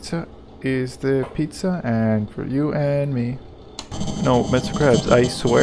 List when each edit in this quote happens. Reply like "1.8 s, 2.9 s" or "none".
3.9 s